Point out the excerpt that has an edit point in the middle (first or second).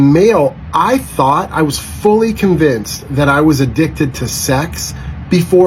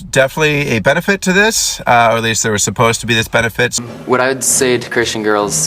second